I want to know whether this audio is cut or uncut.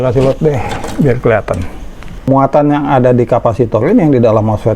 cut